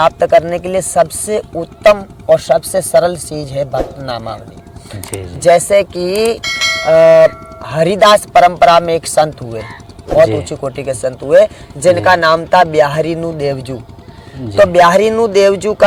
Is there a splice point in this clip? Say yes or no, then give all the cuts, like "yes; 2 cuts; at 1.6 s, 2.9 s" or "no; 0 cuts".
no; 0 cuts